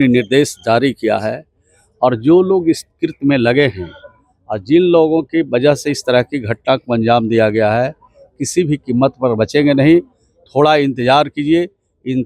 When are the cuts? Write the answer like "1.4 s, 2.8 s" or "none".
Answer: none